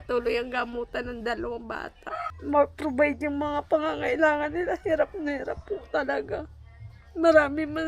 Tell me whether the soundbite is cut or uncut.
cut